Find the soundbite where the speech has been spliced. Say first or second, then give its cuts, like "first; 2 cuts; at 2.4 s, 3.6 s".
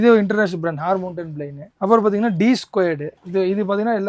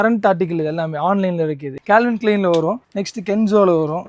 second; 1 cut; at 1.7 s